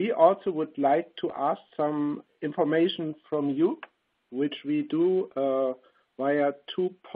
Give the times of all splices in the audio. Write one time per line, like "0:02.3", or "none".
0:05.0